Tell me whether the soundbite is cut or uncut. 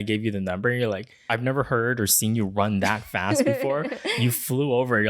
cut